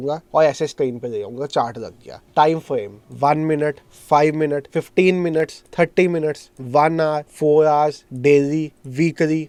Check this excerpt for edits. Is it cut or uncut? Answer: uncut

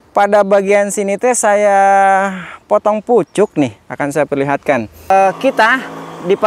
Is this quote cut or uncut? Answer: cut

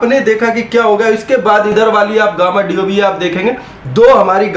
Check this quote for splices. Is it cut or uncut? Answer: uncut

